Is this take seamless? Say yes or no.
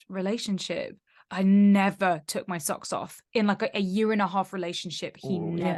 yes